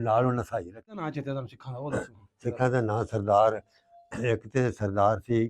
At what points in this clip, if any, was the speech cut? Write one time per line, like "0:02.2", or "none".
0:01.0